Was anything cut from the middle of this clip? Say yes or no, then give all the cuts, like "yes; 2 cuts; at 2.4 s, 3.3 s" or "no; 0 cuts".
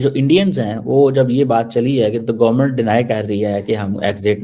no; 0 cuts